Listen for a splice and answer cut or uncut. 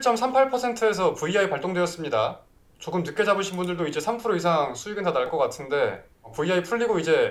uncut